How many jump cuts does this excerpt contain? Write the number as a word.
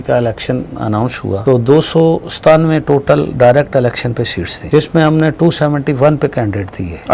two